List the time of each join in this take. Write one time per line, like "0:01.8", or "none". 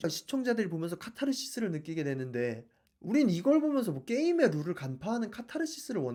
none